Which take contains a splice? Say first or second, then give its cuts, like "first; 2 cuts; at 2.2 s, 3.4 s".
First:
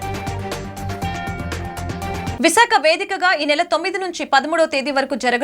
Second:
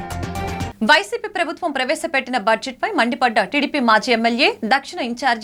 first; 1 cut; at 2.3 s